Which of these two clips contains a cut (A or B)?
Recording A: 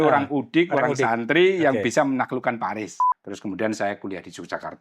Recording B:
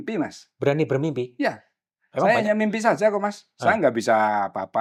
A